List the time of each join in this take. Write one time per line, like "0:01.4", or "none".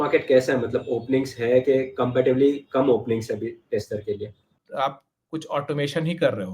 0:04.6